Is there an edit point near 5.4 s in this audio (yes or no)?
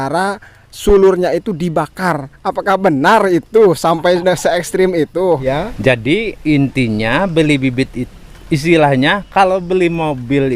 yes